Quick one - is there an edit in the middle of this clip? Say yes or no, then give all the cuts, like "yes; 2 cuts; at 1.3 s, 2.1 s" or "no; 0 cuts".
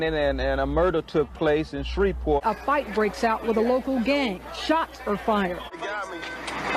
yes; 2 cuts; at 2.4 s, 5.8 s